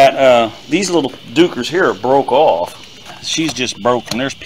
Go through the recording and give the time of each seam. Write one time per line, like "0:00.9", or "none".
0:03.1